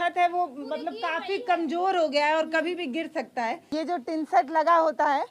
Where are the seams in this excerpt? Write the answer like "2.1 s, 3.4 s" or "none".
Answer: 3.6 s